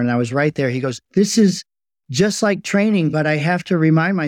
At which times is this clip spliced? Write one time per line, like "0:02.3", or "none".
none